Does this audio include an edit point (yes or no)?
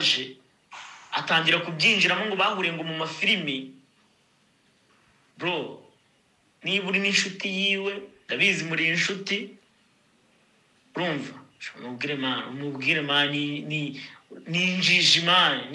no